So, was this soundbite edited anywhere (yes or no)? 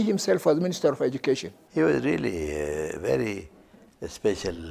yes